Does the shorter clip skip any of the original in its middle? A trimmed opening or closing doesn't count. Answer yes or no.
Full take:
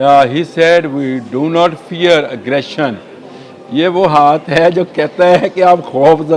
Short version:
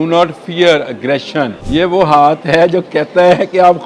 yes